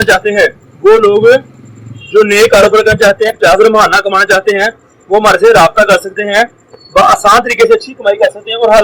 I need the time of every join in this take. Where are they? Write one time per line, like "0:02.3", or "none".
0:03.3